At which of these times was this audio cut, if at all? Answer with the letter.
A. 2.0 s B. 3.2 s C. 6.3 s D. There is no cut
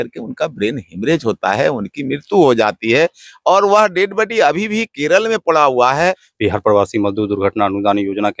C